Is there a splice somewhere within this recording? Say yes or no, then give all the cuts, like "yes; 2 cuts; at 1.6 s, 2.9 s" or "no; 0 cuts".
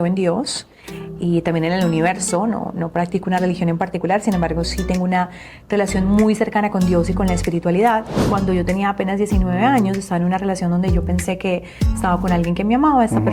yes; 1 cut; at 8.2 s